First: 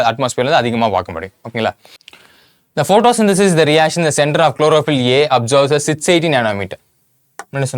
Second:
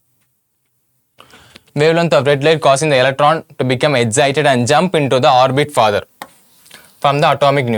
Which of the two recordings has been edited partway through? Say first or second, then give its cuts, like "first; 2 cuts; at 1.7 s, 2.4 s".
first; 1 cut; at 2.0 s